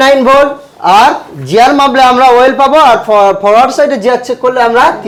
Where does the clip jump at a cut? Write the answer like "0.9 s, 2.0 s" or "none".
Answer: none